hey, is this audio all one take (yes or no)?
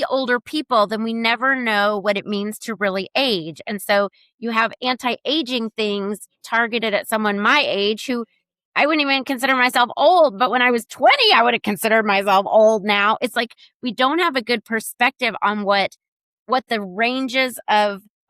yes